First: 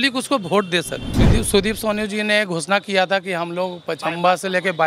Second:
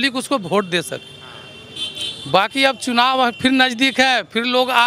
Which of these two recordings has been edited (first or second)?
first